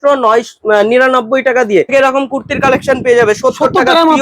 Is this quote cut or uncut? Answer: cut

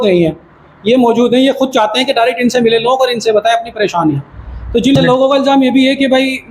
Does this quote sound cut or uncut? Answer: cut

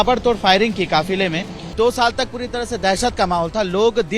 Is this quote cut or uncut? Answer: cut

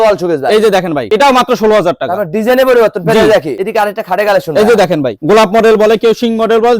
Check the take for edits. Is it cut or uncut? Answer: cut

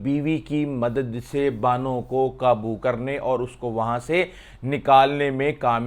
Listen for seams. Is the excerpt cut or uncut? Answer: uncut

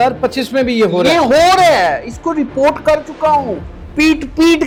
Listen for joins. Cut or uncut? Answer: uncut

